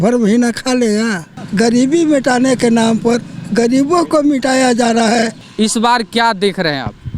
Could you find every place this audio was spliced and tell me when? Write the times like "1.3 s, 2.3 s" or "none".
1.4 s, 5.4 s